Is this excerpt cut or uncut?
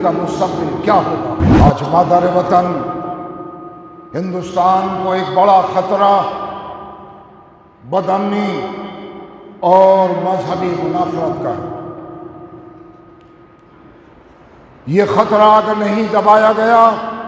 cut